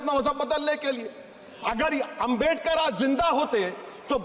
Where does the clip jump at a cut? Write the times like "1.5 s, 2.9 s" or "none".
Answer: none